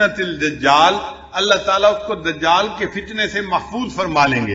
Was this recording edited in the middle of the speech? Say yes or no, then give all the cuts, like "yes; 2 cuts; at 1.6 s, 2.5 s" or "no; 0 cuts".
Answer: no; 0 cuts